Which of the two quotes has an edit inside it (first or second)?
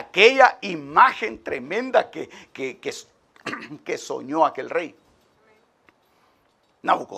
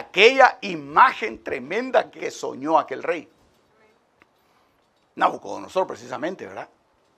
second